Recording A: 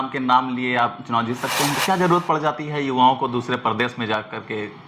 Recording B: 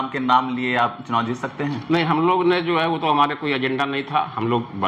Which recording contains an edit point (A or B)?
A